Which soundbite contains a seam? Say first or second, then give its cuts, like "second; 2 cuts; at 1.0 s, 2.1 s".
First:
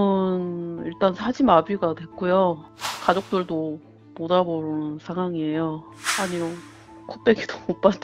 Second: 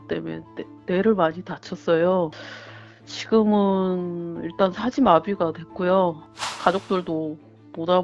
first; 1 cut; at 5.8 s